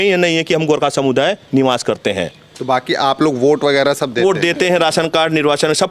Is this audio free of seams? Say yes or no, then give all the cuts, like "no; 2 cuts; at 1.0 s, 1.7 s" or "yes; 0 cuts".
yes; 0 cuts